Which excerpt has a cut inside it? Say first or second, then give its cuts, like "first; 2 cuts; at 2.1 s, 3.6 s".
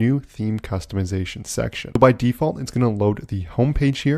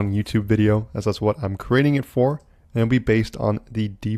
first; 1 cut; at 2.0 s